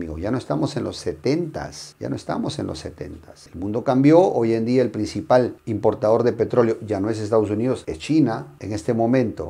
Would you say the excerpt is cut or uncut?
uncut